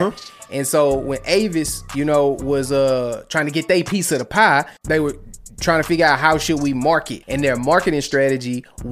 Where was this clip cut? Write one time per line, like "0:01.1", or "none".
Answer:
0:04.8
0:07.2